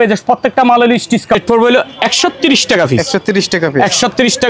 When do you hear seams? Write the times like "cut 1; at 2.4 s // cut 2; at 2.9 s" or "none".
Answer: cut 1; at 1.4 s

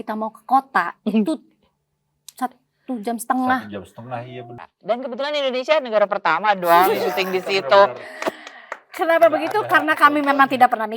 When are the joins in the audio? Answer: cut 1; at 4.4 s

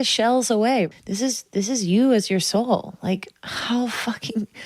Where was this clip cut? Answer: cut 1; at 0.9 s

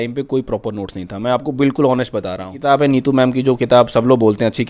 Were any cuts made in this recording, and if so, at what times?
cut 1; at 2.6 s

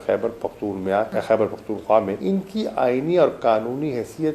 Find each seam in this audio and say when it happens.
cut 1; at 1.1 s // cut 2; at 2.2 s

